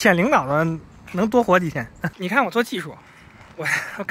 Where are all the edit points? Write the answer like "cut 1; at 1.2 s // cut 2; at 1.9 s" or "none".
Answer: cut 1; at 2.0 s